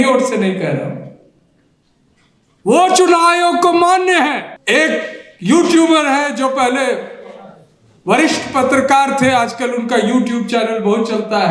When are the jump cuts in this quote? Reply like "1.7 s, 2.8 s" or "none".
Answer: 4.5 s